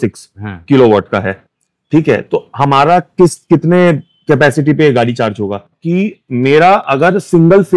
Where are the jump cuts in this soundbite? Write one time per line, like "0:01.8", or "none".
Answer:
0:05.7